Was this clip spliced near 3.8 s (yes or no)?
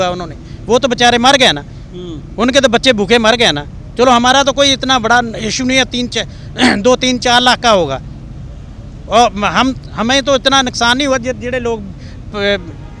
no